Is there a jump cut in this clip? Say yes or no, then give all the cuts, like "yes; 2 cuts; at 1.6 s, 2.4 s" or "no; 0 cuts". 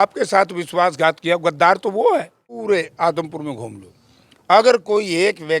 yes; 1 cut; at 2.6 s